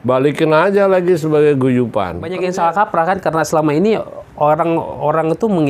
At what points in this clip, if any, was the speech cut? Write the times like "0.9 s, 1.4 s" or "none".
2.2 s